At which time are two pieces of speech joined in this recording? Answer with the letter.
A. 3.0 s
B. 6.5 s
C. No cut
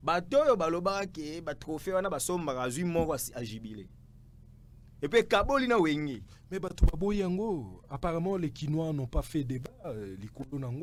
C